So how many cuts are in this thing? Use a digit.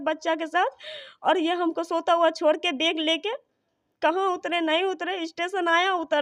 0